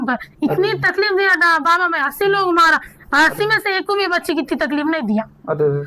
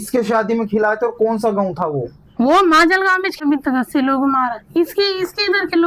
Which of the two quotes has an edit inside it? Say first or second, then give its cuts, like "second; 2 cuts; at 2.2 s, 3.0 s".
second; 1 cut; at 3.4 s